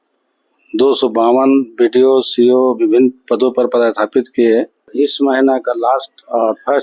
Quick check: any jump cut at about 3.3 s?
no; 1 cut; at 4.9 s

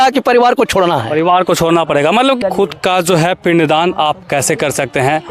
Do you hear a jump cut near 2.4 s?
yes; 1 cut; at 2.4 s

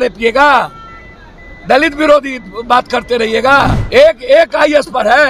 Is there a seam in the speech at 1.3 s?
no; 1 cut; at 3.8 s

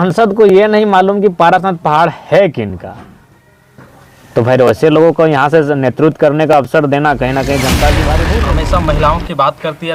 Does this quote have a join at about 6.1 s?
no; 1 cut; at 8.2 s

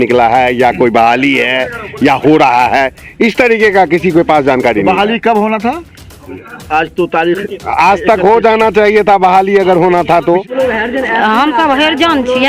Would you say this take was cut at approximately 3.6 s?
no; 1 cut; at 10.4 s

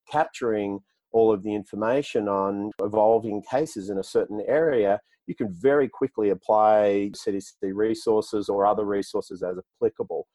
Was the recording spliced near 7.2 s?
yes; 2 cuts; at 2.8 s, 7.2 s

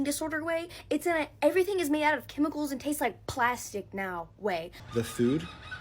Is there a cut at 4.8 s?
yes; 1 cut; at 4.8 s

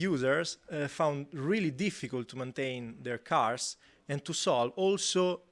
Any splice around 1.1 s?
no; 0 cuts

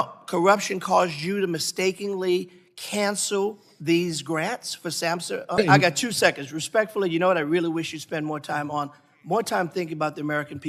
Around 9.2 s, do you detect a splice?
no; 1 cut; at 5.6 s

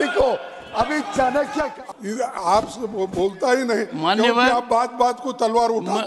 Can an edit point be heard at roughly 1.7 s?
yes; 1 cut; at 1.7 s

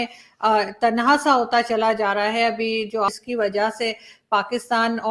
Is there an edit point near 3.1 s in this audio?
yes; 1 cut; at 3.1 s

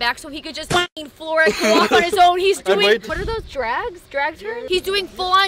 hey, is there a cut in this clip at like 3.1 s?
yes; 3 cuts; at 1.0 s, 3.1 s, 4.6 s

